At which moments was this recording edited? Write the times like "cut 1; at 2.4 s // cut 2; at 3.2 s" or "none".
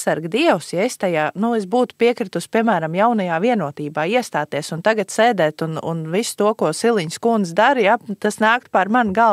none